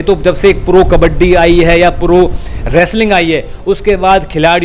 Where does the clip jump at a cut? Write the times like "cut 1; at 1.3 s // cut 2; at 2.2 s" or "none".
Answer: none

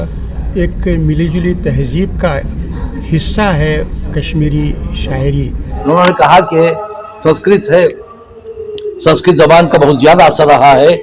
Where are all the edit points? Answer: cut 1; at 5.7 s

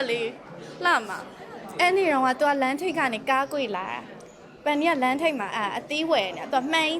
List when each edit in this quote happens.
cut 1; at 1.2 s

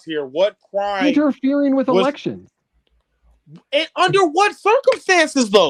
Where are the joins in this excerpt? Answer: none

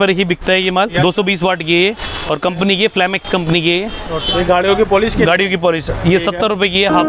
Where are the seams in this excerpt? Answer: cut 1; at 0.9 s // cut 2; at 4.2 s

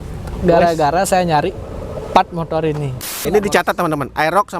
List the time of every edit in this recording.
cut 1; at 3.1 s

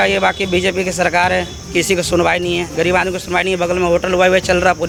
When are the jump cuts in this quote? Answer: none

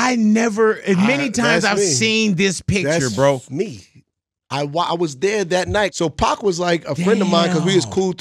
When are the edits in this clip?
cut 1; at 5.9 s

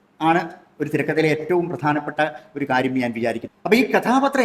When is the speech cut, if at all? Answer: cut 1; at 3.5 s

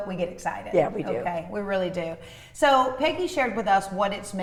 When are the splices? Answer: none

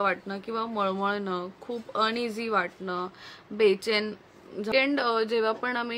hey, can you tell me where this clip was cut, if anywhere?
cut 1; at 4.7 s

